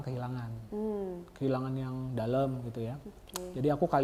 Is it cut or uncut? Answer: uncut